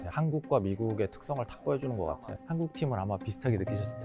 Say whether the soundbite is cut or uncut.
cut